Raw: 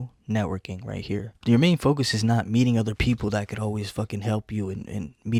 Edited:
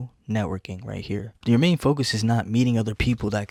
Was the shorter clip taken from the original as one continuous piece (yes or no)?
yes